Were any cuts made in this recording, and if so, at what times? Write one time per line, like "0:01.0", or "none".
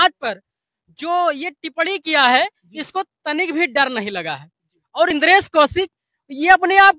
0:05.1